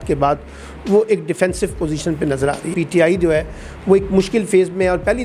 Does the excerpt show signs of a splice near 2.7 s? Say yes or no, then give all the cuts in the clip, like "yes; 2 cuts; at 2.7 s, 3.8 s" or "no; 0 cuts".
yes; 1 cut; at 2.7 s